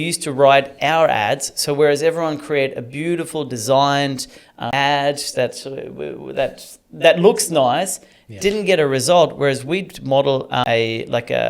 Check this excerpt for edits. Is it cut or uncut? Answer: cut